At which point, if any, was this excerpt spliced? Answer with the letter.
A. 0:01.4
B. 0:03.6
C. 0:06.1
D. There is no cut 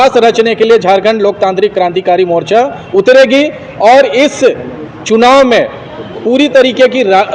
D